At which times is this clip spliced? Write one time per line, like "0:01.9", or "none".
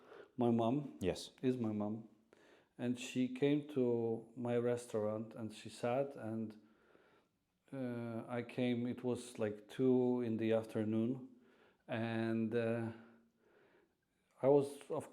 none

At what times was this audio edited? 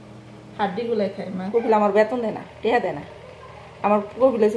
0:01.4

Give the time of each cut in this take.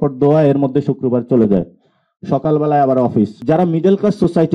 0:03.4

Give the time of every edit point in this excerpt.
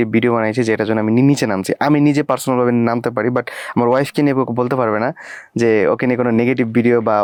none

